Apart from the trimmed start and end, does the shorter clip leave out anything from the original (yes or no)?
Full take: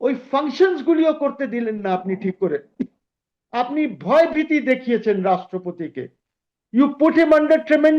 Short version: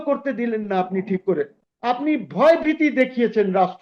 yes